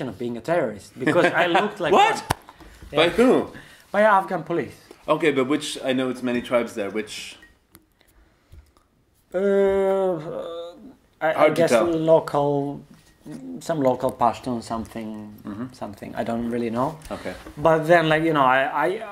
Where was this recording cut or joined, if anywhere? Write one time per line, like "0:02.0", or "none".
none